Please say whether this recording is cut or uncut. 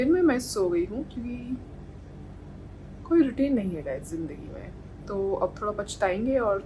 uncut